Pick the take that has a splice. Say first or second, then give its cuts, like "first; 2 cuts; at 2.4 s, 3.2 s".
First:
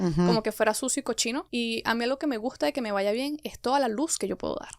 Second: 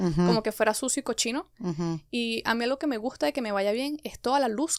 first; 1 cut; at 1.5 s